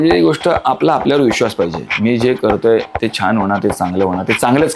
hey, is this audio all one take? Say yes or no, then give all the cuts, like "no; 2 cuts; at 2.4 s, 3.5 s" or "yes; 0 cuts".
yes; 0 cuts